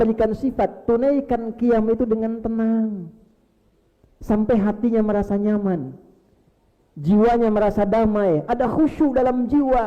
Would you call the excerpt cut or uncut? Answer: uncut